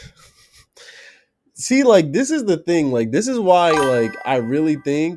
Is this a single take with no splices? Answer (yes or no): yes